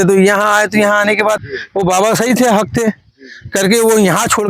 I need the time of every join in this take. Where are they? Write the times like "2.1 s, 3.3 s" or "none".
1.4 s